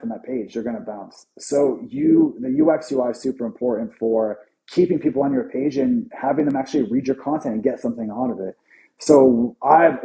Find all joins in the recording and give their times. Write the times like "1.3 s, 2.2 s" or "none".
none